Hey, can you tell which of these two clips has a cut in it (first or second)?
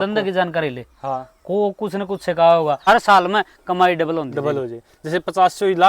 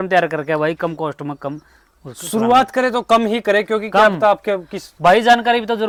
first